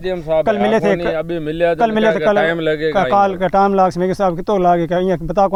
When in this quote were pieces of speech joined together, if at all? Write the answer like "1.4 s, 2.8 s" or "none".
none